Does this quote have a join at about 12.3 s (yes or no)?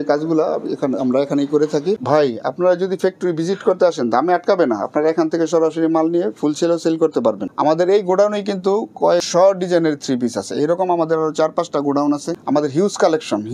yes